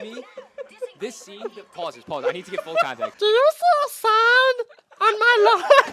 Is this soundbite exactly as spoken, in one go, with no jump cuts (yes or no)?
no